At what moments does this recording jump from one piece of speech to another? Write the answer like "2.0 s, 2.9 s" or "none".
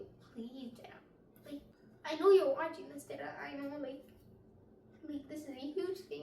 1.8 s